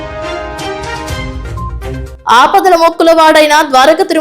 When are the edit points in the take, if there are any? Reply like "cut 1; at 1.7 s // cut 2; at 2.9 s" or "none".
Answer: cut 1; at 2.0 s